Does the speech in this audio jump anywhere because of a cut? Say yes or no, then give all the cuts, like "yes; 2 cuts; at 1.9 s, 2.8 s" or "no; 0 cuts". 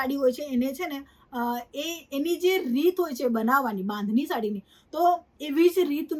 no; 0 cuts